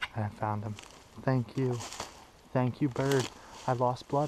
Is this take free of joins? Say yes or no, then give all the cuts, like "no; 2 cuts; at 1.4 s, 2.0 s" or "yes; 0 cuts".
yes; 0 cuts